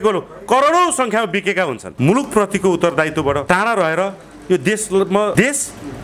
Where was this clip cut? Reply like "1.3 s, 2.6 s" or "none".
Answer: 1.8 s, 3.4 s, 5.3 s